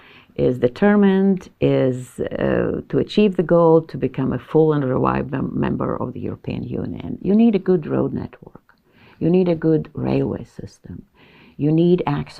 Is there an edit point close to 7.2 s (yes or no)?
yes